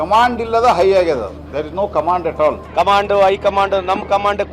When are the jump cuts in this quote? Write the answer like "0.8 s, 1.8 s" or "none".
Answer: 2.6 s